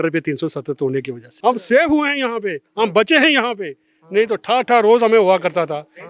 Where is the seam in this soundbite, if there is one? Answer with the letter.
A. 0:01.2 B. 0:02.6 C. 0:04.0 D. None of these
A